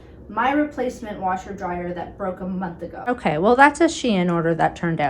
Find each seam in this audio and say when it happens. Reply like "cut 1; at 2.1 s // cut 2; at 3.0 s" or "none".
cut 1; at 3.1 s